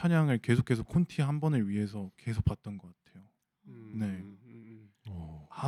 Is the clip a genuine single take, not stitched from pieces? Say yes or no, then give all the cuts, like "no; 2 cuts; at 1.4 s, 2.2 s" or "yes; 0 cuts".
yes; 0 cuts